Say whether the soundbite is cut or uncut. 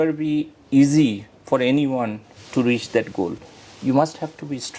uncut